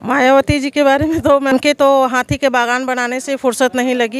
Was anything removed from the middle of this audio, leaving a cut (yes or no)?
yes